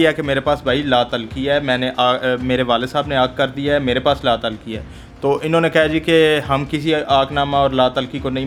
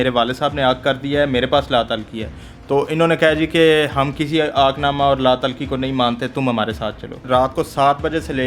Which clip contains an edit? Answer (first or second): second